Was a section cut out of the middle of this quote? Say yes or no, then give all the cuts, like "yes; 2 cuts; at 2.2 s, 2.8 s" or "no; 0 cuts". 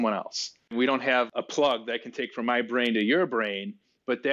yes; 1 cut; at 1.0 s